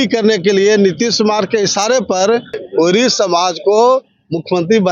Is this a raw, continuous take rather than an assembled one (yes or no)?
no